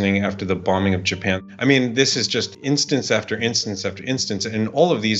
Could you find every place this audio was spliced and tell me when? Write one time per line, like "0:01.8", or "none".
0:01.4
0:02.5